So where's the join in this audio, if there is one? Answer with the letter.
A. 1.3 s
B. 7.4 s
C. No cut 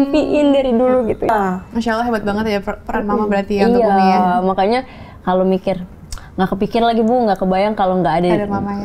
A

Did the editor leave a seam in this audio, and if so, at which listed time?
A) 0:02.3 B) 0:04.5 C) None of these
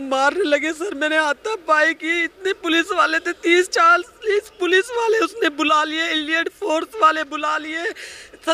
C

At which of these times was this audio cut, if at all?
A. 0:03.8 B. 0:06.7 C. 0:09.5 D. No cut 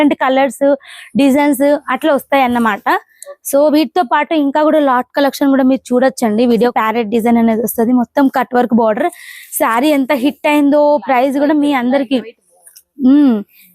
B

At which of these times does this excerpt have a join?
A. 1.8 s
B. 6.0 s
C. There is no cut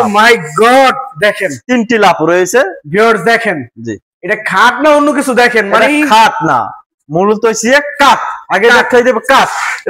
C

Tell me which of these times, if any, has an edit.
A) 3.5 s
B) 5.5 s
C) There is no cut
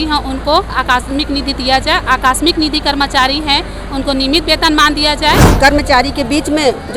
B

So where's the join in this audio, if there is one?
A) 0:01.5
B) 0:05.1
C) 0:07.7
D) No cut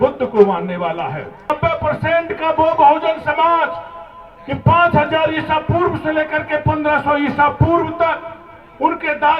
A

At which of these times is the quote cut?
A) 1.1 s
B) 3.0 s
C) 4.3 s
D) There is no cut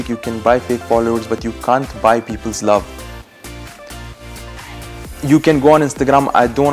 D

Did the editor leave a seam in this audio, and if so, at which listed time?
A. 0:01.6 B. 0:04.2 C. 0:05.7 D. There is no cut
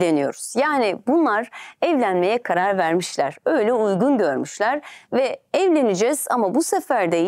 D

